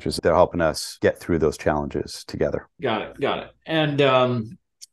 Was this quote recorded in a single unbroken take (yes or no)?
yes